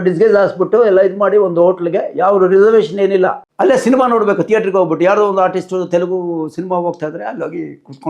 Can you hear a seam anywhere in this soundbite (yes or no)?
yes